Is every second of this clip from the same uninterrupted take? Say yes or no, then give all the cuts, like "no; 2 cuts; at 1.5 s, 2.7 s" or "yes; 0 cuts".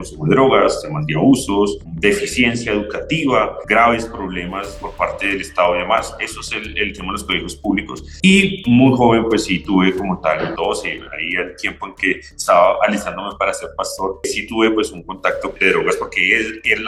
no; 1 cut; at 15.5 s